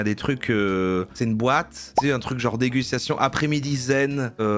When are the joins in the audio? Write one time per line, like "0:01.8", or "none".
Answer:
0:01.1